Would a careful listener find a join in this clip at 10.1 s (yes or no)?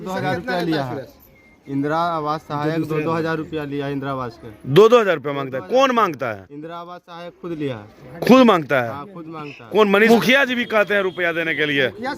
yes